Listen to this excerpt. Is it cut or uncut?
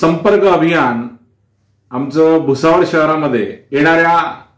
cut